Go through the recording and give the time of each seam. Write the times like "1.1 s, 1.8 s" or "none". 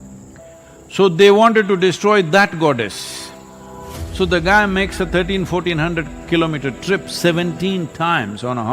0.9 s